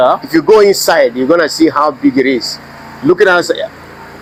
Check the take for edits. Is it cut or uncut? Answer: uncut